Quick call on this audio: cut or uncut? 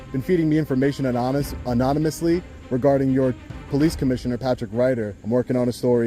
cut